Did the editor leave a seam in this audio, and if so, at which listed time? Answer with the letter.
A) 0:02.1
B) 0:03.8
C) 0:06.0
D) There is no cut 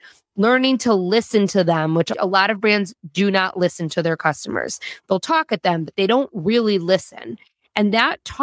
A